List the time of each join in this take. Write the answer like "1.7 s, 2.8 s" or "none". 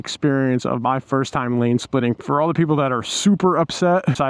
2.2 s